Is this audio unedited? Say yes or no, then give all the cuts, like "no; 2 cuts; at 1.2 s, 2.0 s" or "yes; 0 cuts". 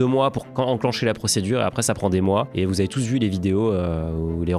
yes; 0 cuts